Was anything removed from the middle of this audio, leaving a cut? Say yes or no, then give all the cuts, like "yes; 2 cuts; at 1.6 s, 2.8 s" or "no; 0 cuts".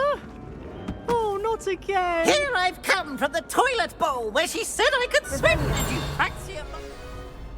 yes; 1 cut; at 6.4 s